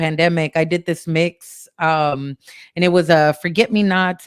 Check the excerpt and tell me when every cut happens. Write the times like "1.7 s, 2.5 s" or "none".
none